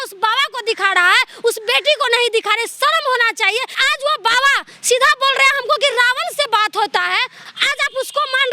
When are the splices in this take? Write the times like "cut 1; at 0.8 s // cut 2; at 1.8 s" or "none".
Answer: cut 1; at 3.8 s // cut 2; at 7.4 s